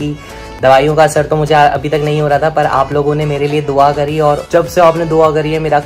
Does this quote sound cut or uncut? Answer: cut